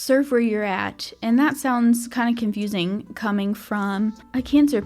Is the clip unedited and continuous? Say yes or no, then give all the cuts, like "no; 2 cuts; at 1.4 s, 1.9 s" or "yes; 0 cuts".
yes; 0 cuts